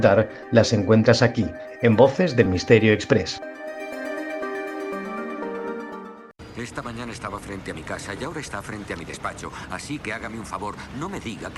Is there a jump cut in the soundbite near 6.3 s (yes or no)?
yes